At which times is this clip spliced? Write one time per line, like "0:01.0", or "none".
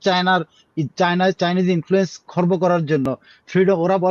none